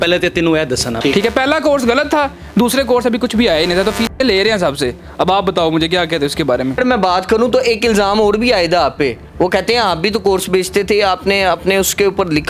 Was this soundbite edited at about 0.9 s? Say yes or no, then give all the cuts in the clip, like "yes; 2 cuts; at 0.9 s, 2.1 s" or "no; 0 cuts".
yes; 2 cuts; at 0.9 s, 6.8 s